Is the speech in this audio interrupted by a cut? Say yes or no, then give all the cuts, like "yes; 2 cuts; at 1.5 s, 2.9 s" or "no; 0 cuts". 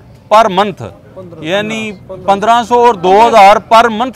no; 0 cuts